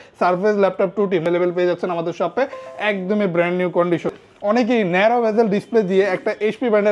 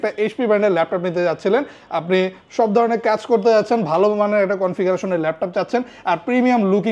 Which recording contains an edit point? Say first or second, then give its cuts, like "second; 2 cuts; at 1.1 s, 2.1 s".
first; 2 cuts; at 1.2 s, 4.1 s